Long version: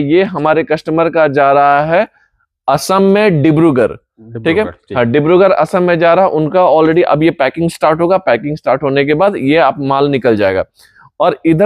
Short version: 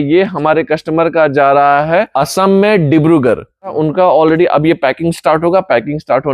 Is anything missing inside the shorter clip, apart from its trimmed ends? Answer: yes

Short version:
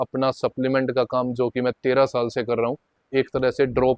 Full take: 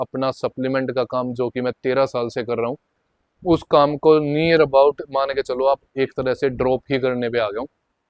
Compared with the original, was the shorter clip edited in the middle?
yes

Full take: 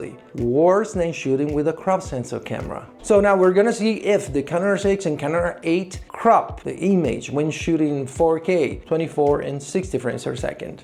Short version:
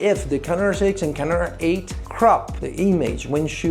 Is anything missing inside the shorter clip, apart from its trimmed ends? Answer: no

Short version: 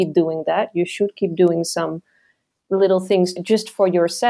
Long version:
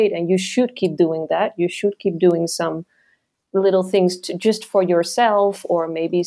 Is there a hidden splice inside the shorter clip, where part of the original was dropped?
yes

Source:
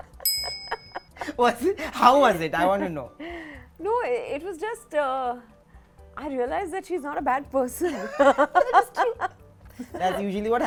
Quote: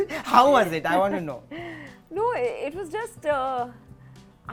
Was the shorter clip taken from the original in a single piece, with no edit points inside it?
yes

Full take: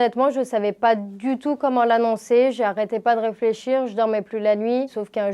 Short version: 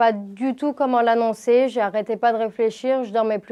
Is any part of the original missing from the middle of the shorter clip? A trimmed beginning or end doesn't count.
no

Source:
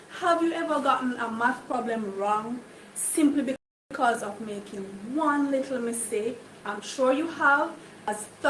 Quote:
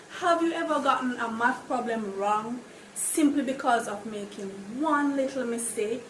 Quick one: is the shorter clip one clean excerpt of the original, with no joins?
no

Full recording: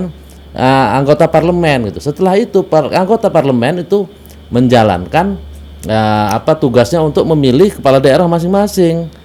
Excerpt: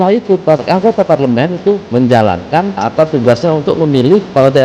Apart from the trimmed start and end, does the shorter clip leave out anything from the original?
yes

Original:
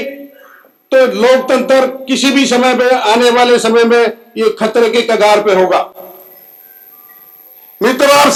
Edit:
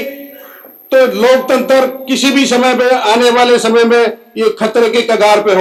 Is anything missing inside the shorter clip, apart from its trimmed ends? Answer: no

